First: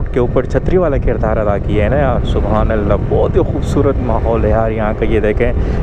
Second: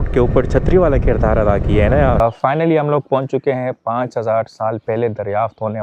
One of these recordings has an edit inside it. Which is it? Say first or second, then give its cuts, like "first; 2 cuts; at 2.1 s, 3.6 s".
second; 1 cut; at 2.2 s